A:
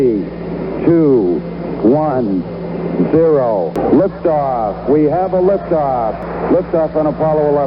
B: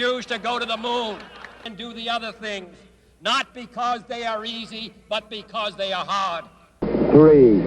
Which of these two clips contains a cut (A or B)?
A